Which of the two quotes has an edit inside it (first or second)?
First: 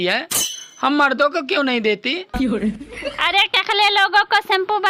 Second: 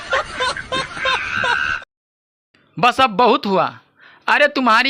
second